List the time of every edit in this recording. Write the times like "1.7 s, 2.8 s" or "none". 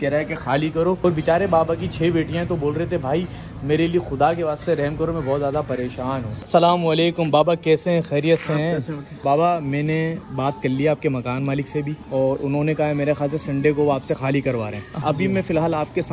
1.0 s, 6.4 s, 9.2 s, 12.0 s, 14.9 s